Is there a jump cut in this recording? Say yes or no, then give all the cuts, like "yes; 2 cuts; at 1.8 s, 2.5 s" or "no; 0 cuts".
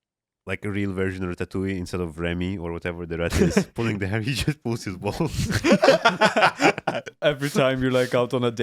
yes; 1 cut; at 7.2 s